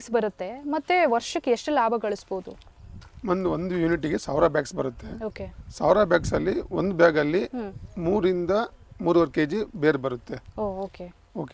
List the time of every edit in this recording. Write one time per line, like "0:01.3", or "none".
none